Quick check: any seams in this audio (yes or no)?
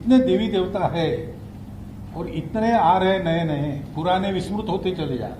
no